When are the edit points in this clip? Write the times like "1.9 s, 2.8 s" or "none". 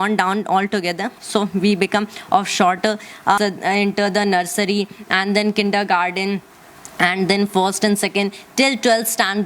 3.4 s